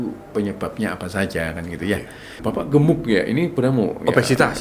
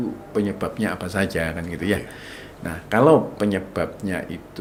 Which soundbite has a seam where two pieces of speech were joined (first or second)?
first